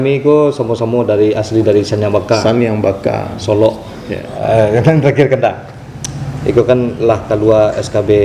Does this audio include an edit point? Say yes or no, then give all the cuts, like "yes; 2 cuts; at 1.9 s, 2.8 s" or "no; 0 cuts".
yes; 1 cut; at 4.3 s